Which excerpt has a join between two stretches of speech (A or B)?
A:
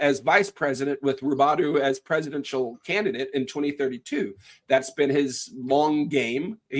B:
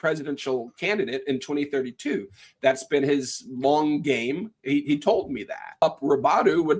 B